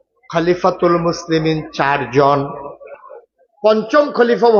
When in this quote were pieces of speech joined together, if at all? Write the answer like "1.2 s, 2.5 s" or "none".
2.9 s